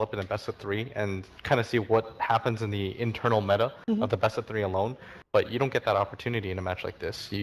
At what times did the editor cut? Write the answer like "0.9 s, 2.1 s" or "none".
none